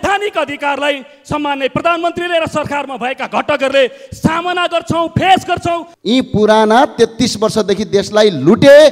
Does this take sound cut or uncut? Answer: cut